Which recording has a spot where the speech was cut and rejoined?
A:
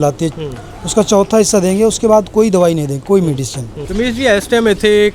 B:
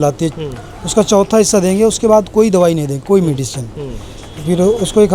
A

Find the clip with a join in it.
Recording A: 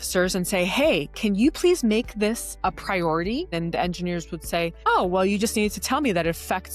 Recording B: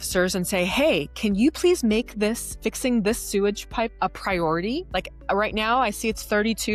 A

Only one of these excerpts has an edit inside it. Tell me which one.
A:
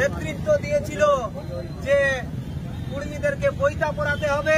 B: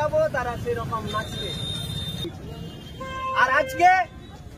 B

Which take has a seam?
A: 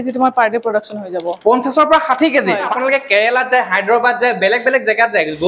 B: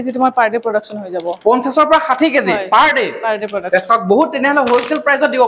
A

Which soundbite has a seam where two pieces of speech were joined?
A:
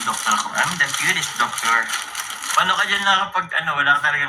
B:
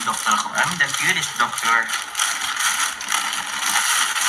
A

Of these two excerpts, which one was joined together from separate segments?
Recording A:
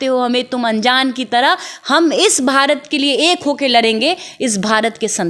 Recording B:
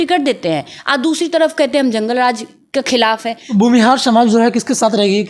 B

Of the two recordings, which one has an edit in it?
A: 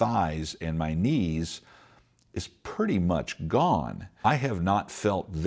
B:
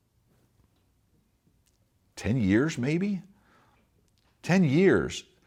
A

